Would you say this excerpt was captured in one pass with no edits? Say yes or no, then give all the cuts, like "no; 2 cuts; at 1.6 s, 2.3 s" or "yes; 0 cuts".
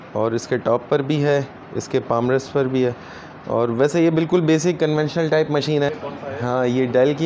no; 1 cut; at 5.9 s